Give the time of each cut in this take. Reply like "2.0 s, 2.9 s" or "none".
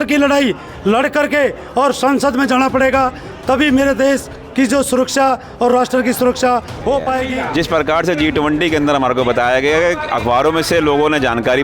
7.3 s